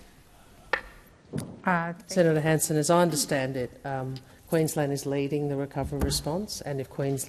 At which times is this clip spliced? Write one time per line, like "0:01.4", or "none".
0:02.0